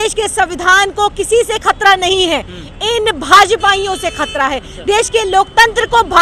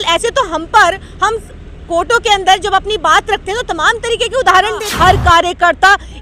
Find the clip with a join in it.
second; 1 cut; at 4.9 s

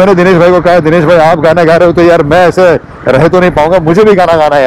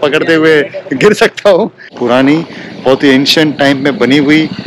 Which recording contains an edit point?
second; 1 cut; at 2.0 s

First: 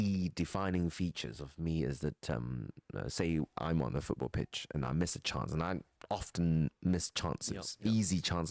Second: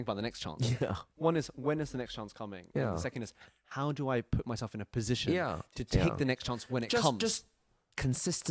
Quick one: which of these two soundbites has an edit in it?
second; 1 cut; at 1.1 s

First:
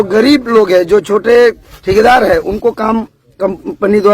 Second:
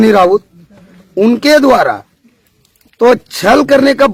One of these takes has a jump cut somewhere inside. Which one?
first; 1 cut; at 1.7 s

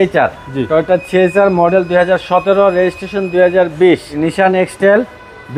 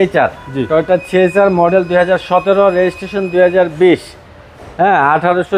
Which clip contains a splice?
first; 1 cut; at 4.2 s

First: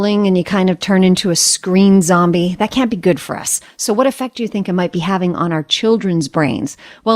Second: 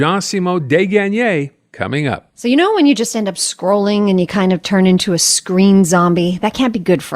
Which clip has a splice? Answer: second; 1 cut; at 2.2 s

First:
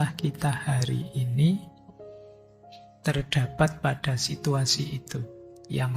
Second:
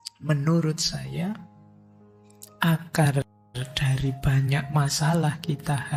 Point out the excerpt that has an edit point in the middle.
first; 2 cuts; at 1.7 s, 3.0 s

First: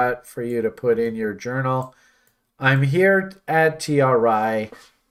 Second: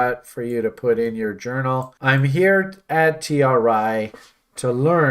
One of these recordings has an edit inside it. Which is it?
second; 1 cut; at 1.9 s

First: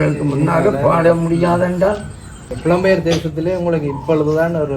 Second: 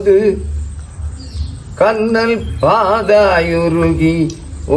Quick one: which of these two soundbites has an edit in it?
first; 1 cut; at 2.6 s

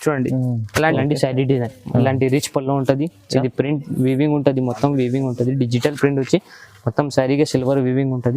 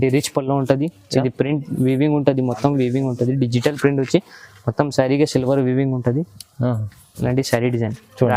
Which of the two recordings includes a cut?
first; 1 cut; at 0.9 s

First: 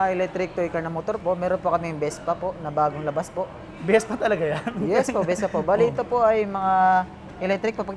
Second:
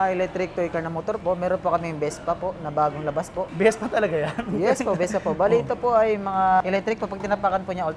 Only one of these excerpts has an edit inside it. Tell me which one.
second; 2 cuts; at 3.5 s, 6.6 s

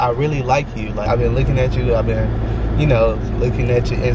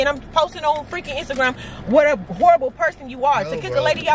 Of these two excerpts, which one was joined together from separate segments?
first; 1 cut; at 1.1 s

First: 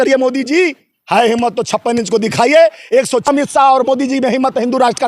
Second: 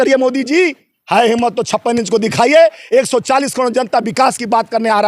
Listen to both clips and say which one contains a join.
first; 1 cut; at 3.3 s

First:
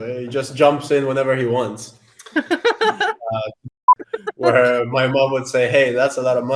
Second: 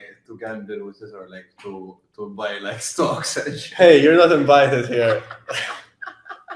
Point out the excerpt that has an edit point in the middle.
first; 1 cut; at 3.7 s

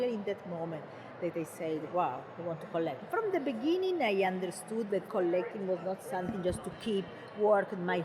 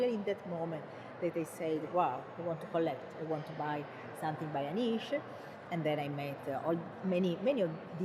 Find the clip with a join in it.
first; 2 cuts; at 3.1 s, 5.1 s

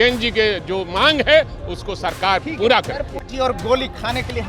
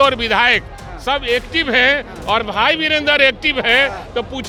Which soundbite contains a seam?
first; 1 cut; at 3.2 s

